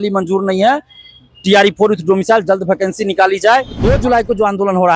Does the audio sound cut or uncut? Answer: cut